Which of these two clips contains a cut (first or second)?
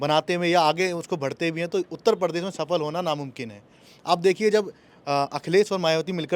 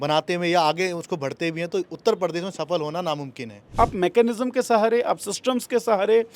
second